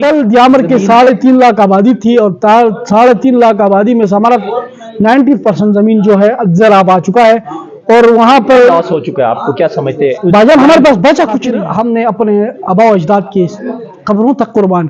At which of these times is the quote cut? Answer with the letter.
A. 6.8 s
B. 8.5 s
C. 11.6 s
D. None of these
C